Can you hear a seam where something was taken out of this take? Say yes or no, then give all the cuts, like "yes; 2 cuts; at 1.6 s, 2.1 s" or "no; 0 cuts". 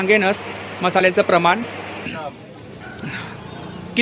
yes; 1 cut; at 2.1 s